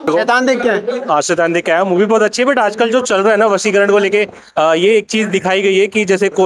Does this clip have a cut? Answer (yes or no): no